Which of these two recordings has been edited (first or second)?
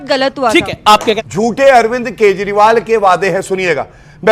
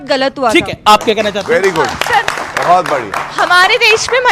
first